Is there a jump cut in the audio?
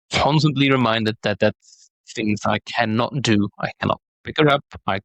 no; 0 cuts

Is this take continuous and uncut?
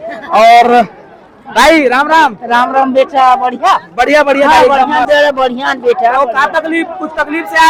yes; 0 cuts

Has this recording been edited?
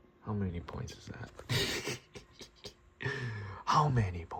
no; 0 cuts

